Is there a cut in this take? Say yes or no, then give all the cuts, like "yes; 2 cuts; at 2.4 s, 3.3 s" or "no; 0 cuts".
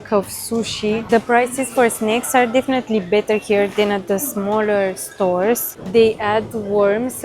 yes; 2 cuts; at 1.0 s, 5.7 s